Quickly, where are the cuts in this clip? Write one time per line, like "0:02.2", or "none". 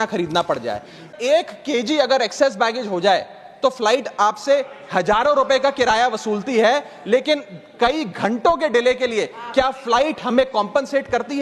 0:01.1